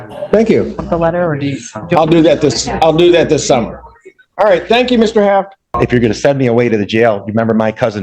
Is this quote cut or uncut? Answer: cut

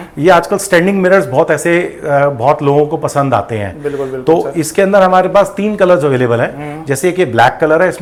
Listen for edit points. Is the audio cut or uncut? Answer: uncut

